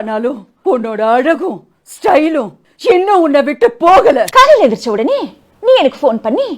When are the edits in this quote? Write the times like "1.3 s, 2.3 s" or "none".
4.3 s